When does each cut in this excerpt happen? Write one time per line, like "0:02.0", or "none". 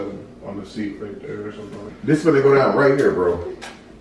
0:01.9

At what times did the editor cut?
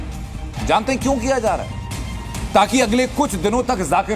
none

